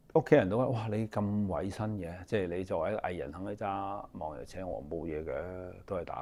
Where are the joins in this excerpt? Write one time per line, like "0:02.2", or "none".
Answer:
none